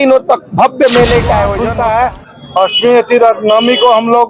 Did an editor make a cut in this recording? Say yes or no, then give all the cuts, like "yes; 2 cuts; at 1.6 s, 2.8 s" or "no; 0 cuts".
yes; 1 cut; at 1.6 s